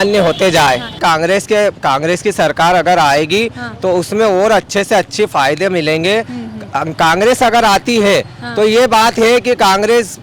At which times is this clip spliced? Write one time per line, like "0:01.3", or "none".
0:01.0